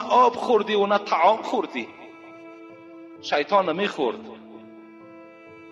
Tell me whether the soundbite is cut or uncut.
cut